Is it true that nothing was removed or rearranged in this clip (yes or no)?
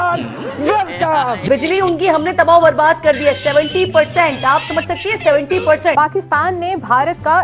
no